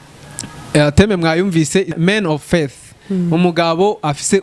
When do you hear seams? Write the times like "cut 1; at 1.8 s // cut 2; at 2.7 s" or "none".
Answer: cut 1; at 2.0 s